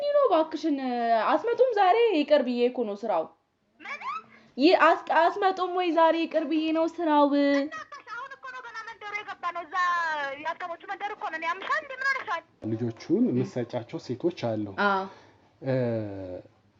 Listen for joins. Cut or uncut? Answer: cut